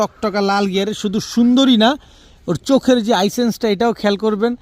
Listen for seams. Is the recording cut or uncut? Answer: uncut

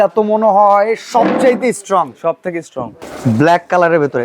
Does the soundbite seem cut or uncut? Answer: cut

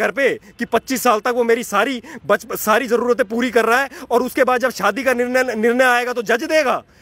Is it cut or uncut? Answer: uncut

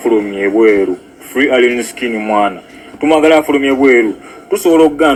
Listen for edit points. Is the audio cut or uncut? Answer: uncut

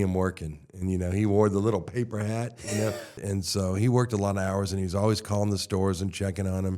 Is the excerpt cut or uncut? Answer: cut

